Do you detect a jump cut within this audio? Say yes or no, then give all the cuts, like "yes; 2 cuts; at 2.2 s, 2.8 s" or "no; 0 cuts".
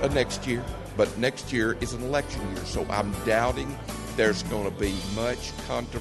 yes; 1 cut; at 0.9 s